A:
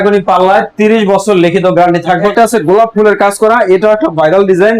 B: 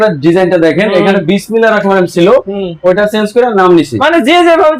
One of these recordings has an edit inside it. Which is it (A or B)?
A